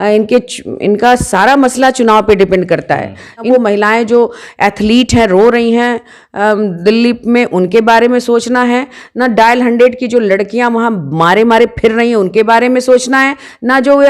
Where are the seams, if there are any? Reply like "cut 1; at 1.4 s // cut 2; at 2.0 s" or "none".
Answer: cut 1; at 3.5 s